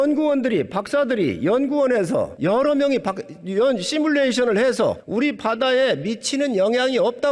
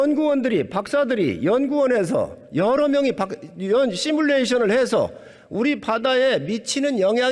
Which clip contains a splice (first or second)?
first